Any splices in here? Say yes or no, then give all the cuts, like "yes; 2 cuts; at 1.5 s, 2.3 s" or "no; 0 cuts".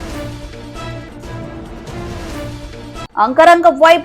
yes; 1 cut; at 2.6 s